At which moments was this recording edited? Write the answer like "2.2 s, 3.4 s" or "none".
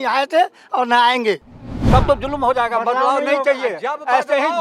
1.8 s